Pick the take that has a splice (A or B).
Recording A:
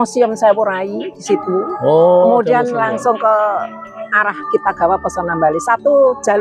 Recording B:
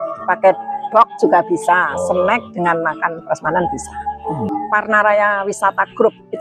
B